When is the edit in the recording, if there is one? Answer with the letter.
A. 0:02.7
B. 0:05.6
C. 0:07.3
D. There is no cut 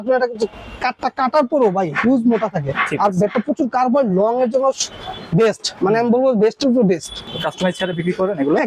C